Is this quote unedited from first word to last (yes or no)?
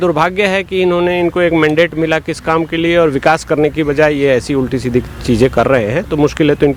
yes